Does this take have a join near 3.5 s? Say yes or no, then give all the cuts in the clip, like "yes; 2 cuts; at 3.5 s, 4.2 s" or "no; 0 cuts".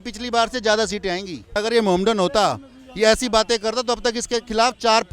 no; 1 cut; at 1.5 s